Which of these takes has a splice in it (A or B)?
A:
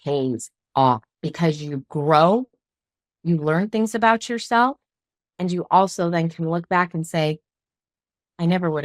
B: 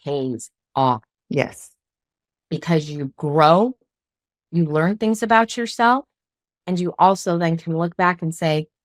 A